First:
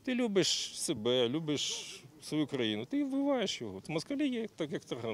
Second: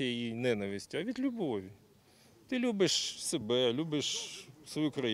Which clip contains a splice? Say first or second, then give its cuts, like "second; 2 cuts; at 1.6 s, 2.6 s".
first; 1 cut; at 3.8 s